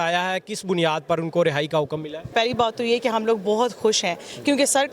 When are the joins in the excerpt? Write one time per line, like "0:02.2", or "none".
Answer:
0:02.3